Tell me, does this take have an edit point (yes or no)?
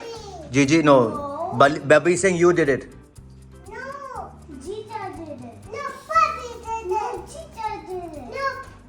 no